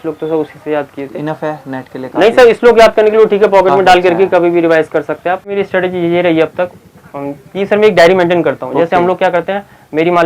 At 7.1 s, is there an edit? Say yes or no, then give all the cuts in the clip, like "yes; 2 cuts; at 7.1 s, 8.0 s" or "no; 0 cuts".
no; 1 cut; at 5.6 s